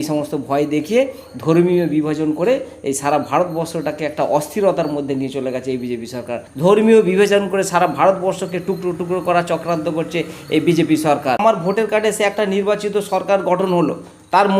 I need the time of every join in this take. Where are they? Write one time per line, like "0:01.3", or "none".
0:06.4
0:11.4